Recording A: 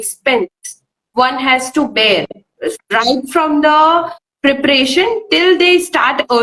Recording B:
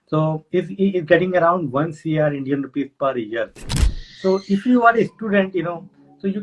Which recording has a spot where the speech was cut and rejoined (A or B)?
B